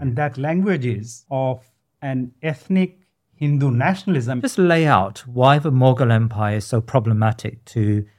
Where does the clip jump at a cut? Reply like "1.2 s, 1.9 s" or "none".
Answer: 1.1 s, 4.4 s